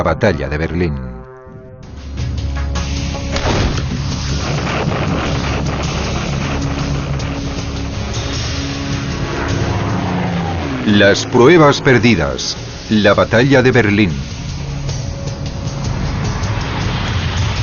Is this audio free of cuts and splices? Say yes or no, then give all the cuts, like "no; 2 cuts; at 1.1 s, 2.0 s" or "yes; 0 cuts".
yes; 0 cuts